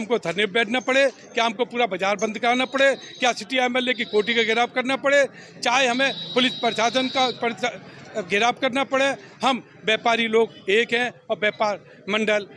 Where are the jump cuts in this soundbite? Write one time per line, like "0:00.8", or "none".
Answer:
none